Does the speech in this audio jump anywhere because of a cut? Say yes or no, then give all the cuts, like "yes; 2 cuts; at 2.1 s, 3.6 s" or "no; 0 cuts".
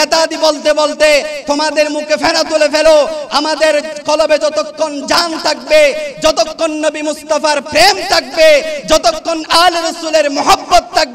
no; 0 cuts